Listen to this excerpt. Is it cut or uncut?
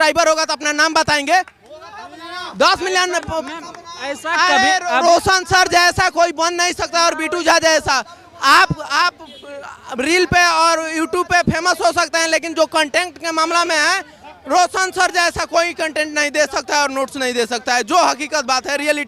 uncut